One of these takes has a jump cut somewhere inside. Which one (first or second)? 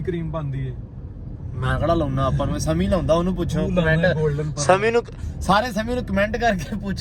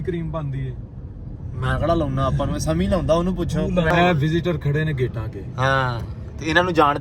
second